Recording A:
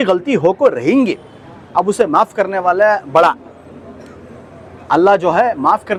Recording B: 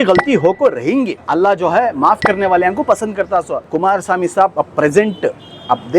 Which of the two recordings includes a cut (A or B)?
B